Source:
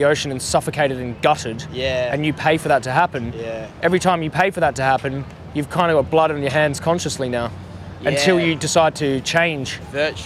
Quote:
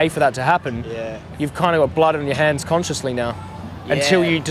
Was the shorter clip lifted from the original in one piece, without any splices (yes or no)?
no